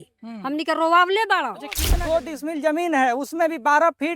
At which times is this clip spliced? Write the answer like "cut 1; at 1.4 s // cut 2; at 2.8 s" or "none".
cut 1; at 1.8 s